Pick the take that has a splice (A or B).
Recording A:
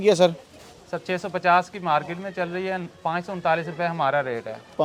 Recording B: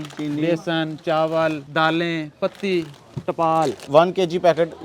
B